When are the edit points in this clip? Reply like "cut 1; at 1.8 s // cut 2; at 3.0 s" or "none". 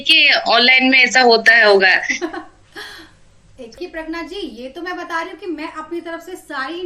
none